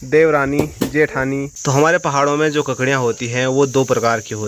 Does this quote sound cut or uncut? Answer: cut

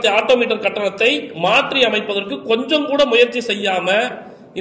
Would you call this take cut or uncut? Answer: uncut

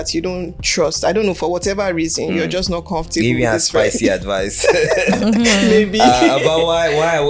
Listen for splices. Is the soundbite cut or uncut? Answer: uncut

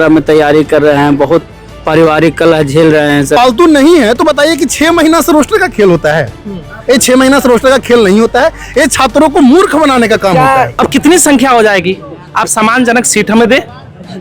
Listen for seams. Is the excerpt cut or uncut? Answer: cut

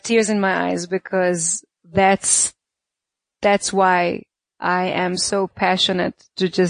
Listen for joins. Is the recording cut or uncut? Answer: uncut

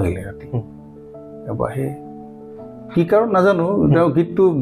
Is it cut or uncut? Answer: uncut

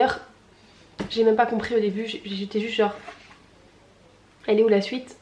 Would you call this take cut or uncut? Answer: uncut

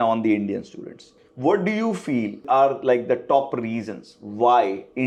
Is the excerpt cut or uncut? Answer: uncut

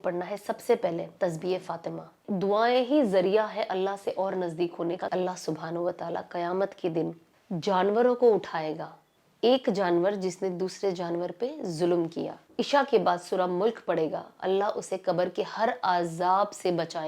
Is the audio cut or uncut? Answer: cut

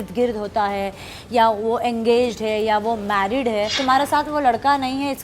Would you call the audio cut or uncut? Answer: cut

